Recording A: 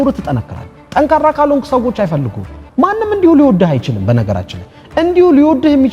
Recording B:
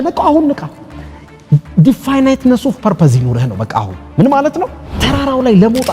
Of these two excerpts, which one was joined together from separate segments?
B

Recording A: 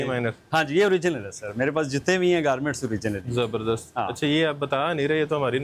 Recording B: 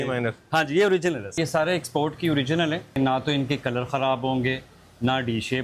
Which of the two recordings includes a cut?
B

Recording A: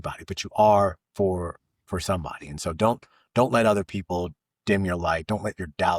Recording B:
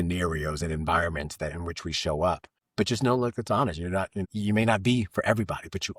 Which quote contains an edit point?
B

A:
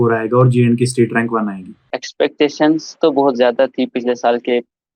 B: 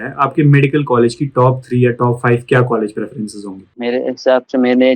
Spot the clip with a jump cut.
A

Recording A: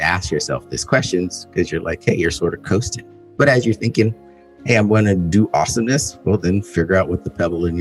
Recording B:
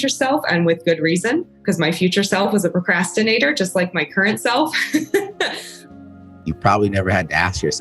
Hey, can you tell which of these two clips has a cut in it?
B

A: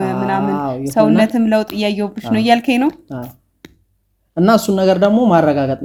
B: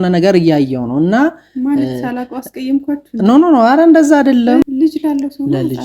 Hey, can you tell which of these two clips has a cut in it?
B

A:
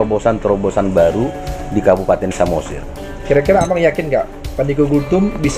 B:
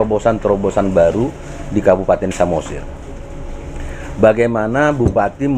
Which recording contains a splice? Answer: A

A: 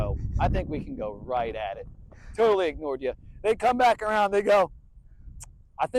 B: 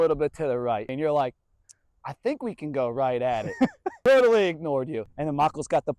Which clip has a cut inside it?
B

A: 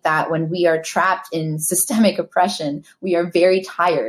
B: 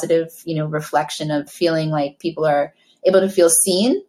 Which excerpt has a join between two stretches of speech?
B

